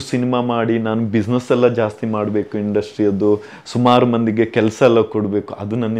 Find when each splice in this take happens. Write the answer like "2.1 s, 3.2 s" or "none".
none